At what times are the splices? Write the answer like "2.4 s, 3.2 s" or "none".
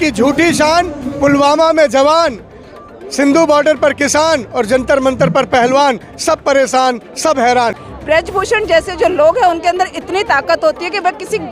7.8 s